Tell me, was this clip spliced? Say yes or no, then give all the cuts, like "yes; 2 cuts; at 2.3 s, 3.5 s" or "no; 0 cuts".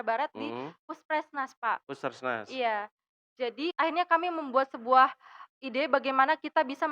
yes; 1 cut; at 3.7 s